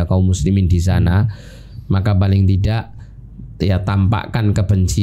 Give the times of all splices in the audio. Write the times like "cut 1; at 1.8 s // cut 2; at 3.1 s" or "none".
none